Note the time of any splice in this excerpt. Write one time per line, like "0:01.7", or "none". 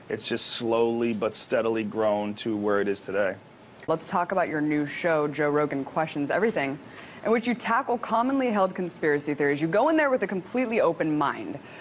0:05.7